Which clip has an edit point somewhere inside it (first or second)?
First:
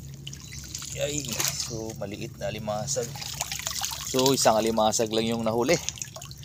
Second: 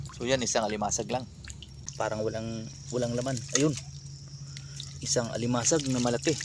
second